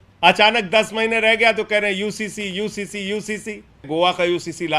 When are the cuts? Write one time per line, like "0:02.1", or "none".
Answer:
0:03.8